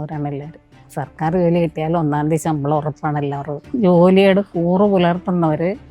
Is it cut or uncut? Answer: cut